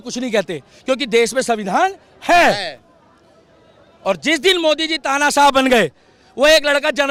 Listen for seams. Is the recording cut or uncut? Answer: uncut